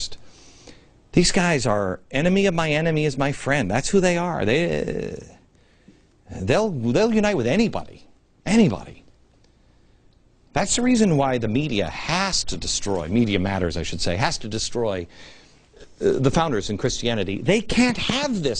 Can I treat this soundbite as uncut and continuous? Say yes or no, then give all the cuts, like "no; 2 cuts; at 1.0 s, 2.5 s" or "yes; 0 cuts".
no; 1 cut; at 10.9 s